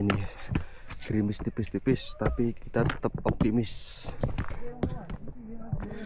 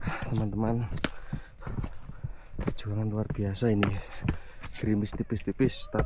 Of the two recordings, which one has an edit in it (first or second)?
first